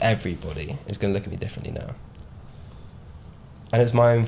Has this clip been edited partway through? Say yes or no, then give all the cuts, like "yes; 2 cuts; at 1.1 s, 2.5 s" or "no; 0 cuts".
no; 0 cuts